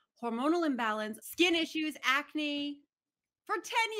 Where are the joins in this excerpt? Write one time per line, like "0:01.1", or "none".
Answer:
0:01.2